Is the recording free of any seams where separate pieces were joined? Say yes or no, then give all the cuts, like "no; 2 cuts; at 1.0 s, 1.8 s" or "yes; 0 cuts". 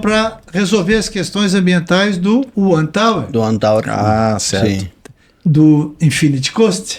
yes; 0 cuts